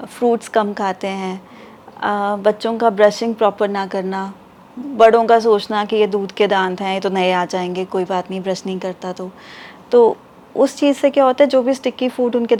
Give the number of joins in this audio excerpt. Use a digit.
0